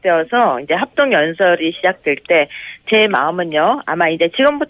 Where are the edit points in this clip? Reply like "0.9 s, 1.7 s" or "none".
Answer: 1.6 s